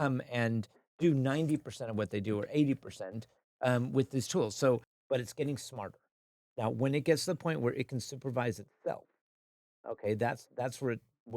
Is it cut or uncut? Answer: cut